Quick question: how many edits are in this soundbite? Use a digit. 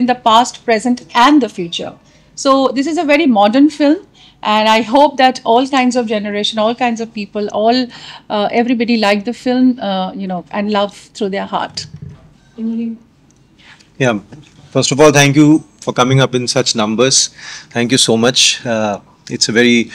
0